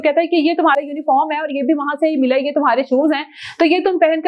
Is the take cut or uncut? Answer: uncut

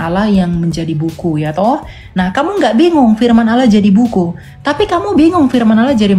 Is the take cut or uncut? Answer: uncut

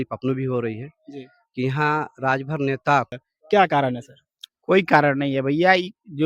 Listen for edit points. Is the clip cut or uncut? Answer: cut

